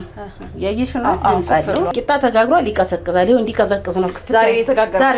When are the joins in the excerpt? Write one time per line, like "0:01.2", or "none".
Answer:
0:01.9